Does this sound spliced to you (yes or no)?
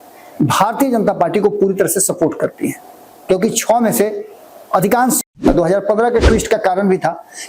yes